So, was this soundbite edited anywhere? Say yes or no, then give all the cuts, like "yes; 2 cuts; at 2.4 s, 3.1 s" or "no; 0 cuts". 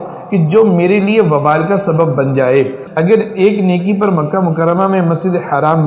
yes; 1 cut; at 2.8 s